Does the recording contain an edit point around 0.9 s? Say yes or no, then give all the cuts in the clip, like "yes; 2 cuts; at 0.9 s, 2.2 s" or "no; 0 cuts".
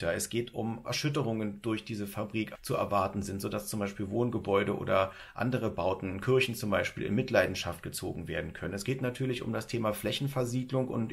yes; 2 cuts; at 0.9 s, 2.5 s